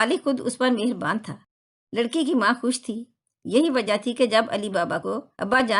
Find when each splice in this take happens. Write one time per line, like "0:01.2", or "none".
0:03.3